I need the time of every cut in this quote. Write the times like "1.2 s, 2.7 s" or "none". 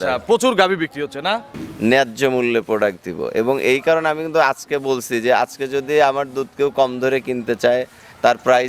1.5 s